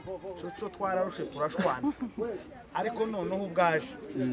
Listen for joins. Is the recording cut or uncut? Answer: uncut